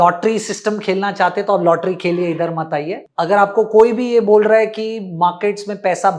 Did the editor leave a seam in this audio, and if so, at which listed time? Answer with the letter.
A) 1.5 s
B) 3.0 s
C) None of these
B